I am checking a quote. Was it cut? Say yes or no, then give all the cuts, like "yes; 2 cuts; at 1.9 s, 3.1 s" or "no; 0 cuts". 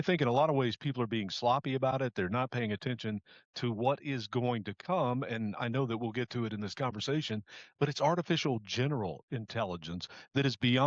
no; 0 cuts